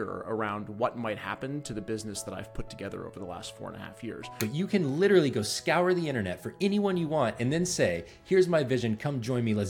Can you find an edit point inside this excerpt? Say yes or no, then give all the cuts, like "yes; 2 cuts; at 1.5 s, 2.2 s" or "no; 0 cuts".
yes; 1 cut; at 4.3 s